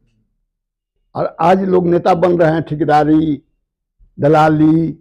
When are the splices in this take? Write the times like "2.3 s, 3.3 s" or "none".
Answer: none